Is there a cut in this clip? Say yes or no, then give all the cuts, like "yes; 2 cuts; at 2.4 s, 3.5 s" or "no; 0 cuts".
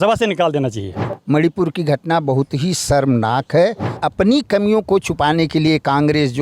yes; 2 cuts; at 1.1 s, 3.9 s